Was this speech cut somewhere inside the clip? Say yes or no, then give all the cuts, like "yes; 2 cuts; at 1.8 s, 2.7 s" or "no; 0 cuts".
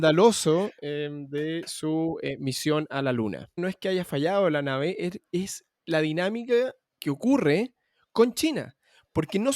yes; 2 cuts; at 3.5 s, 6.9 s